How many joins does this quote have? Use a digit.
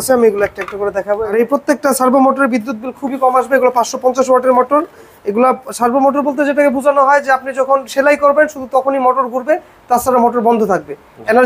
1